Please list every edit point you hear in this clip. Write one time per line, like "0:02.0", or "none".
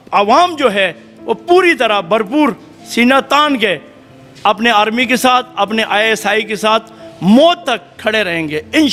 none